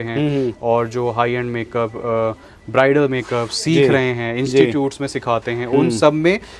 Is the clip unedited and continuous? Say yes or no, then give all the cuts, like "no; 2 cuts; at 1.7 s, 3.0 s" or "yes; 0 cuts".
yes; 0 cuts